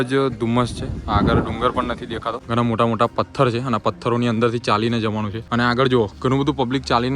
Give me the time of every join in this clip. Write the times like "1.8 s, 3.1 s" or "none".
2.3 s, 5.4 s